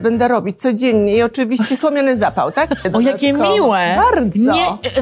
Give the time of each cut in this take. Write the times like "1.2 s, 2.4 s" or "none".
2.8 s